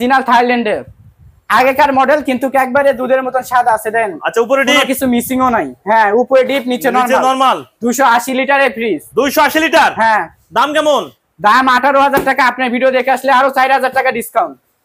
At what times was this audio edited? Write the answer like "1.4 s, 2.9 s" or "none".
none